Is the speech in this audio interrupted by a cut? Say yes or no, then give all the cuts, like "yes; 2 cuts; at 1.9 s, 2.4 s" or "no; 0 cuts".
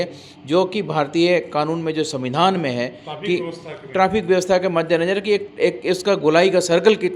no; 0 cuts